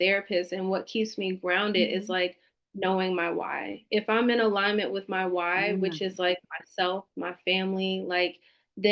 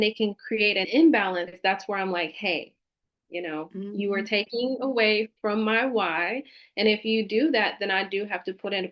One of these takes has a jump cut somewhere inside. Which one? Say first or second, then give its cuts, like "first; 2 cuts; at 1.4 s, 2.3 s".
second; 2 cuts; at 0.9 s, 1.5 s